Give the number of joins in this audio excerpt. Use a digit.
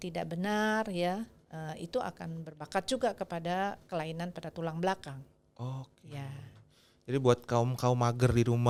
0